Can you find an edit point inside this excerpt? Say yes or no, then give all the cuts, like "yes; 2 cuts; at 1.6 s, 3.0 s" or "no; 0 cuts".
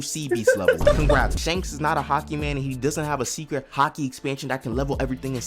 yes; 1 cut; at 1.3 s